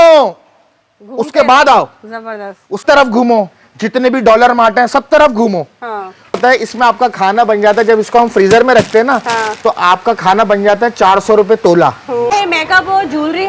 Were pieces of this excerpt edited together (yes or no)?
yes